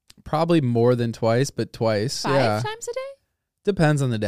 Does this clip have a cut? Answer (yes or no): no